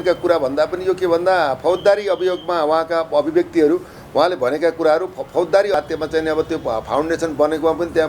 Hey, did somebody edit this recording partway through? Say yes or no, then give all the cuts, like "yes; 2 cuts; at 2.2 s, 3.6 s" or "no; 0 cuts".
yes; 1 cut; at 5.7 s